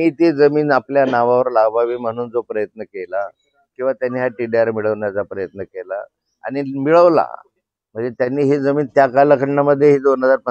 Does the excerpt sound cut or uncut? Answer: uncut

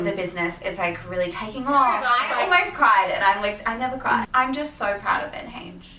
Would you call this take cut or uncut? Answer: cut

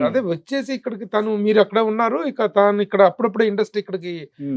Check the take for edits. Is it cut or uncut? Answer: uncut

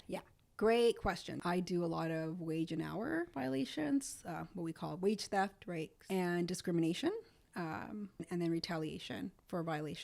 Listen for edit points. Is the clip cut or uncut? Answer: cut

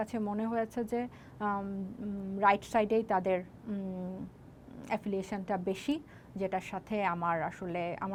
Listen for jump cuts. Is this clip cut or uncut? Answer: uncut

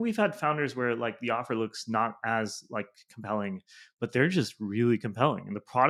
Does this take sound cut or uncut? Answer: uncut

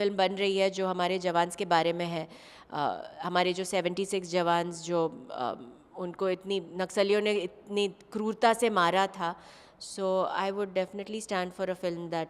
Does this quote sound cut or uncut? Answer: uncut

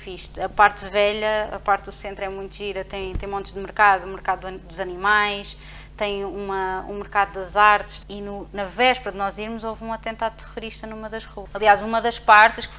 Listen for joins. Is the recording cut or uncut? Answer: cut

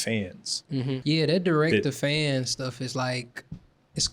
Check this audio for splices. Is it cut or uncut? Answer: cut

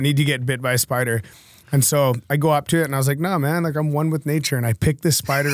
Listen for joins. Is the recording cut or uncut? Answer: uncut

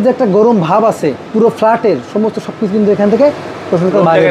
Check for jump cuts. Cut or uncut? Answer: cut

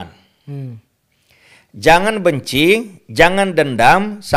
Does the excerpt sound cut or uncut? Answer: uncut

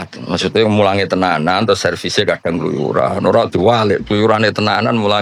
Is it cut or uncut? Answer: uncut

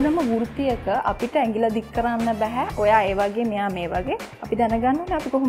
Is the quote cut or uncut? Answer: uncut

